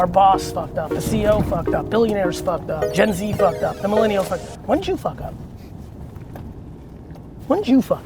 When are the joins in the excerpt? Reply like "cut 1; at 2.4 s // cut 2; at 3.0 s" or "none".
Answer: cut 1; at 2.8 s